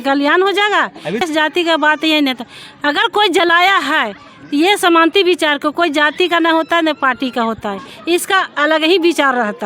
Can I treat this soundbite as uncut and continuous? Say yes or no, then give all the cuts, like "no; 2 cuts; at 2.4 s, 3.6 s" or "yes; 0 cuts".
no; 1 cut; at 1.2 s